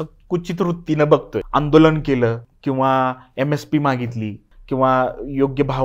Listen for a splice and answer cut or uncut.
cut